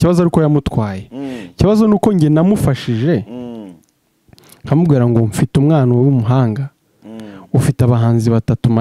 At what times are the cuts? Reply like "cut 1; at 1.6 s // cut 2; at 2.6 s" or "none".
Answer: none